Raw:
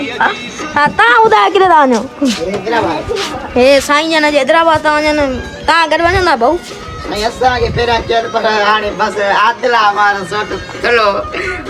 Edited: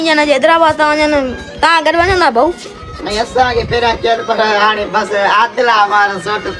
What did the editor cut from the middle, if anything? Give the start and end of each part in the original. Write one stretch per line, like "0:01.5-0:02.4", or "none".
none